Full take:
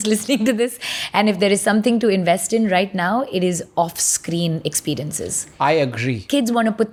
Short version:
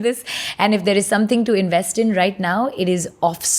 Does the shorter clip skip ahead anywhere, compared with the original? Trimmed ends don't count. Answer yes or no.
no